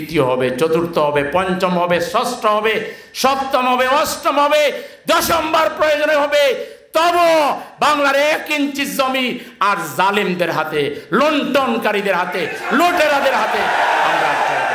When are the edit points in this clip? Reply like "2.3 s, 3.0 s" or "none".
none